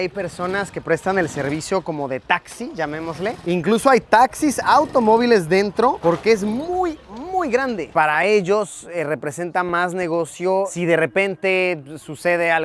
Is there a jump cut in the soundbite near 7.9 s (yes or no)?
yes